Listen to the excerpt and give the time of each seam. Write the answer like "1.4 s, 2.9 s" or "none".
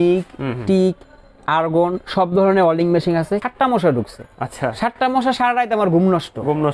3.4 s